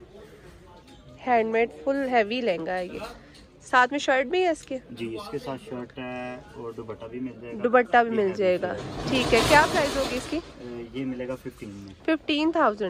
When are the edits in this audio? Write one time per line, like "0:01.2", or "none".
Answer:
none